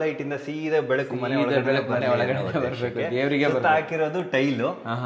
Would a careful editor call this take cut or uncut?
uncut